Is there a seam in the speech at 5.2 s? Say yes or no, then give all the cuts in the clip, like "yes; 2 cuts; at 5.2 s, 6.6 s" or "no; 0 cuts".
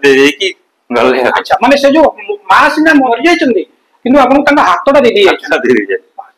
no; 1 cut; at 3.1 s